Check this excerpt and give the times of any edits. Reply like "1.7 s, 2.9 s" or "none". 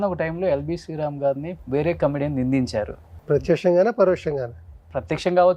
1.5 s, 3.1 s